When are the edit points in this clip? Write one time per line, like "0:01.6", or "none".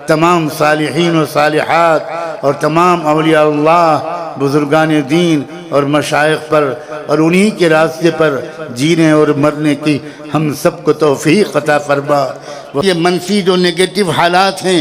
0:12.8